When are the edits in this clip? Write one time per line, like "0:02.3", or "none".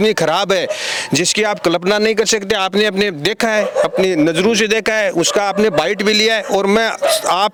none